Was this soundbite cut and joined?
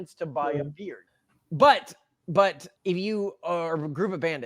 yes; 1 cut; at 1.2 s

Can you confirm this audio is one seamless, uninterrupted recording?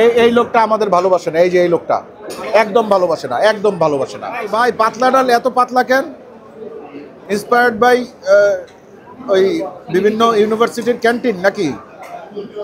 no; 1 cut; at 4.5 s

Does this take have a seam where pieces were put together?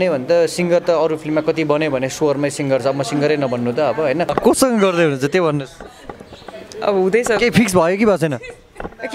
yes; 1 cut; at 4.3 s

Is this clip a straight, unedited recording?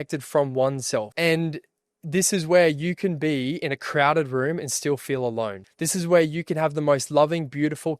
no; 2 cuts; at 1.1 s, 5.6 s

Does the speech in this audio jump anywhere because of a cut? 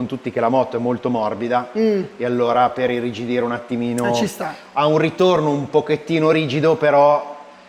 no; 0 cuts

